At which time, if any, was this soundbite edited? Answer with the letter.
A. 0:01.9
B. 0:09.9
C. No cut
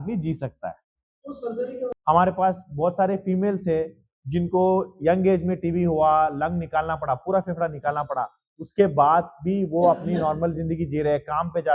A